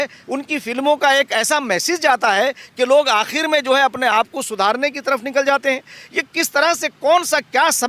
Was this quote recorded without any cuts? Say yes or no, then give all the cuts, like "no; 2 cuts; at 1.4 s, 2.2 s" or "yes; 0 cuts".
yes; 0 cuts